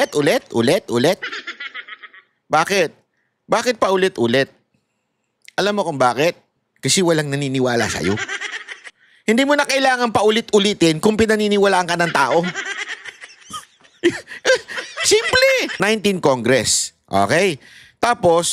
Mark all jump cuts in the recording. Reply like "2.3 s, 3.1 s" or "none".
15.7 s